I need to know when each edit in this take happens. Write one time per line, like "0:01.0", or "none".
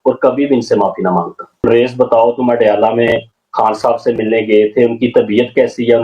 0:01.6